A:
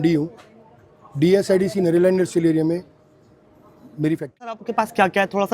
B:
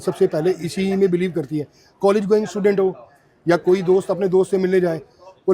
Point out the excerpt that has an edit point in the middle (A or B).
A